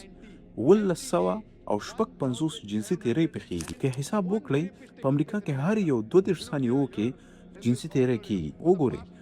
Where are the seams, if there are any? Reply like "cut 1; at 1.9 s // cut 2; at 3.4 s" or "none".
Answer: cut 1; at 3.6 s